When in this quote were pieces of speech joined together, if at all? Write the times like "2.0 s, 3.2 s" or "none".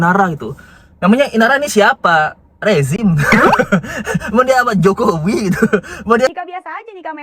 6.3 s